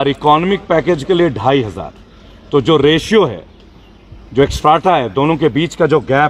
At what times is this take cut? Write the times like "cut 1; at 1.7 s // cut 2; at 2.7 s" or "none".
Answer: none